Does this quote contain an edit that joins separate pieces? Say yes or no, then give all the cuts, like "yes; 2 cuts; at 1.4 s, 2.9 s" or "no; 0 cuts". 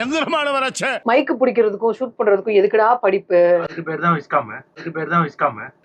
yes; 1 cut; at 1.0 s